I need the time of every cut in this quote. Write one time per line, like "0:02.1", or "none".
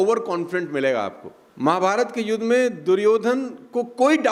none